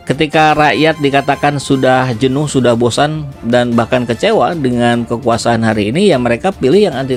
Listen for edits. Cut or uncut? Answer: uncut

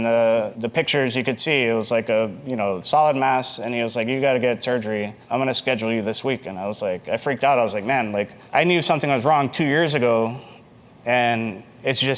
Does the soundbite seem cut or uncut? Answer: cut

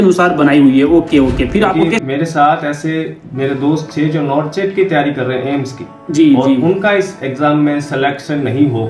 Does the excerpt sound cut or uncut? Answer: cut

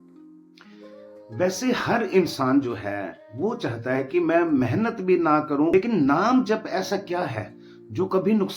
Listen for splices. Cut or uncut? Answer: cut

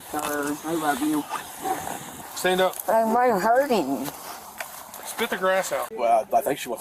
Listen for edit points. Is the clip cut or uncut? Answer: cut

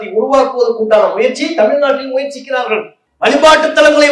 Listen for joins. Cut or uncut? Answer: cut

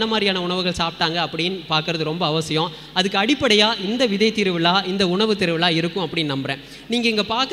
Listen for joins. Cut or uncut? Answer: uncut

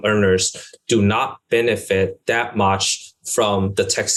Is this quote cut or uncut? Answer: uncut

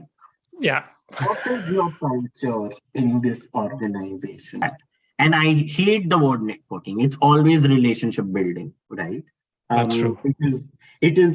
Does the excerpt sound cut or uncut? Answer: cut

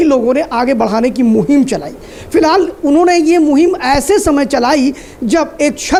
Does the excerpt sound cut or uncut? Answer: uncut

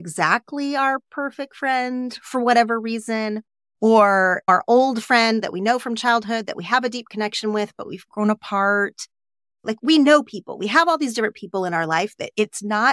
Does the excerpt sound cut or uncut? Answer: cut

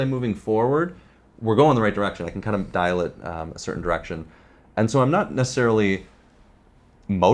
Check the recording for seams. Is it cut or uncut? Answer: uncut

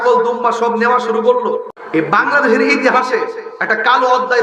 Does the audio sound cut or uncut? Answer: cut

